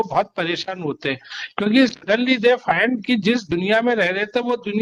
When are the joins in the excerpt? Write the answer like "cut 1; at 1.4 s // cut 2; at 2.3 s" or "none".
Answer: none